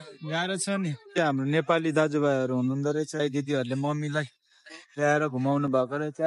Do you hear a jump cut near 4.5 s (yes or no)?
no